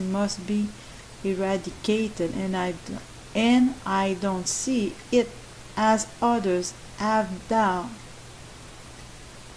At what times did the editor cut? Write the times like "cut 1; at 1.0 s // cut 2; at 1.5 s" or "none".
cut 1; at 1.8 s